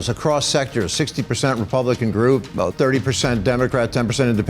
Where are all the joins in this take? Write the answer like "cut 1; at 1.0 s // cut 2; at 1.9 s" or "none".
cut 1; at 2.5 s